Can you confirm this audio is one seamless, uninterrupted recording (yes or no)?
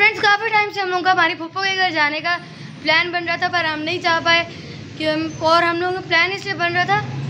yes